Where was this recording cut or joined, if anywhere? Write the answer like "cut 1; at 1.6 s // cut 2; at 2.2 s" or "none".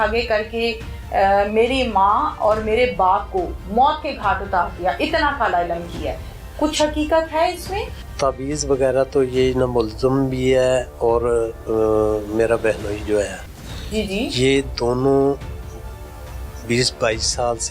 cut 1; at 8.0 s